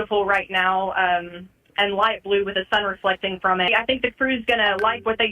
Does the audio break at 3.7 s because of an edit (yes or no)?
yes